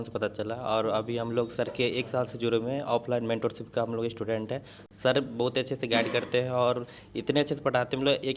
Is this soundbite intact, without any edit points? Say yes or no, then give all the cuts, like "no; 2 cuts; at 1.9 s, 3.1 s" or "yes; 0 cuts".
yes; 0 cuts